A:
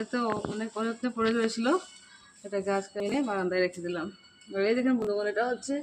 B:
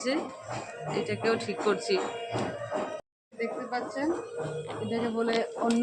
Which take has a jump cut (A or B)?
B